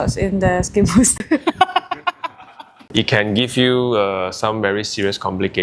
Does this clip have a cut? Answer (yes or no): yes